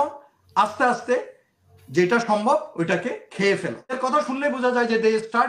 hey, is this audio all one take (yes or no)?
no